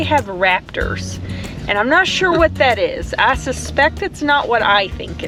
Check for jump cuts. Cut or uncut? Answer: uncut